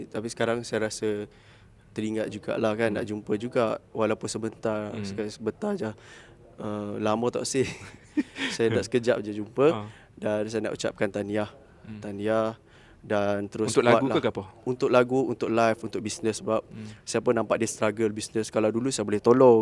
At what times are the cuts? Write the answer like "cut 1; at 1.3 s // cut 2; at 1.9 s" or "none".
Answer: none